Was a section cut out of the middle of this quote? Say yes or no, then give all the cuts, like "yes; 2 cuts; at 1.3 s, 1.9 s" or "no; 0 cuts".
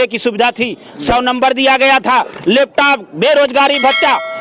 no; 0 cuts